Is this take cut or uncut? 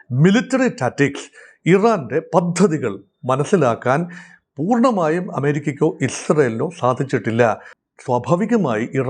cut